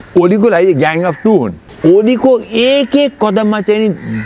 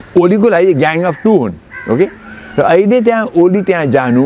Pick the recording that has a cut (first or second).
first